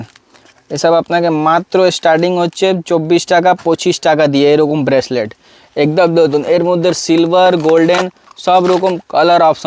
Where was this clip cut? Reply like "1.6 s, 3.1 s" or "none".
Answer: none